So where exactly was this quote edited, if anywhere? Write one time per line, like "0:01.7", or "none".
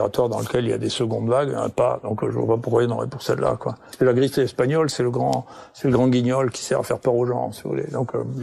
0:03.9

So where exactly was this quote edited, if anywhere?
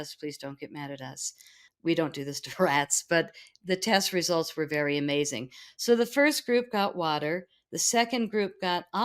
0:01.6

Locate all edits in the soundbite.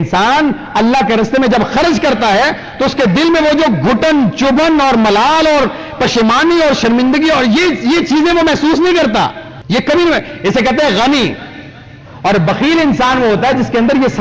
0:09.5

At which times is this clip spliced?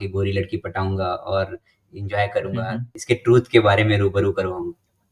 0:02.9

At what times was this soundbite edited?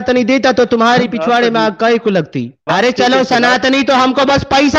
0:02.7

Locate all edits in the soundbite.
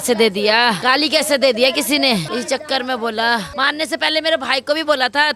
0:00.8
0:02.3
0:03.5

